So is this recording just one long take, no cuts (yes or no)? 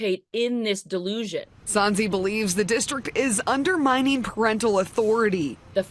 yes